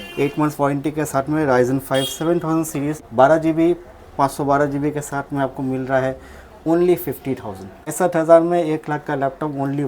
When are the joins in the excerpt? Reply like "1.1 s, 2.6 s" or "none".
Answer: 3.0 s, 7.9 s